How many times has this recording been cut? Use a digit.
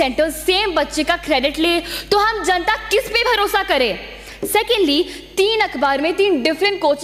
0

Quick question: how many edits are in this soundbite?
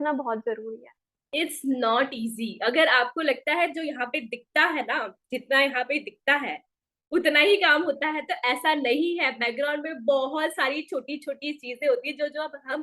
1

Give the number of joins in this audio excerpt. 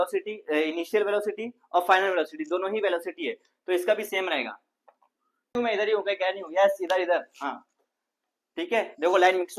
1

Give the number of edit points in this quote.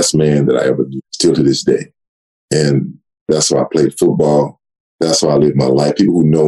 2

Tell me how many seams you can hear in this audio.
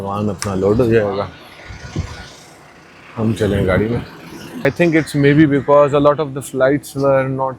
1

